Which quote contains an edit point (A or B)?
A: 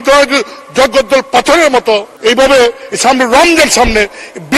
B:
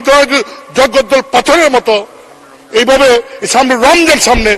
A